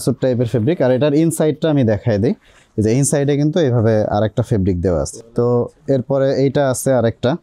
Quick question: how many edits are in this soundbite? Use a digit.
1